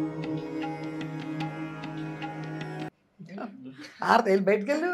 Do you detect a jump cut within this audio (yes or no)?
no